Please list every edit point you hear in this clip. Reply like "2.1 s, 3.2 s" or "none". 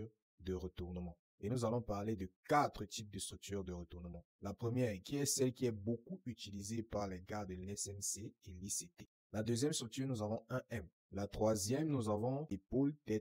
8.9 s, 11.0 s